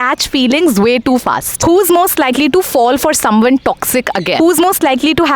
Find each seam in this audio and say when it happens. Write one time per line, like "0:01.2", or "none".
0:01.5
0:04.4